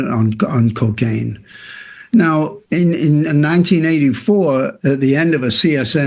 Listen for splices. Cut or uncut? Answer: uncut